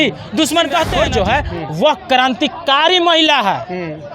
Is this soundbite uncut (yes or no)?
no